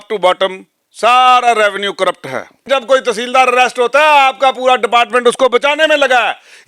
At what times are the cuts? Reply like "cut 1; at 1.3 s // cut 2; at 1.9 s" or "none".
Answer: cut 1; at 2.6 s